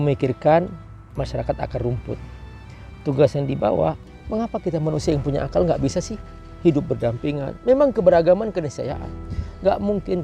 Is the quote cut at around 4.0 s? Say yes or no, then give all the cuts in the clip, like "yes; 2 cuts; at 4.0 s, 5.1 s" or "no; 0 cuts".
yes; 1 cut; at 4.0 s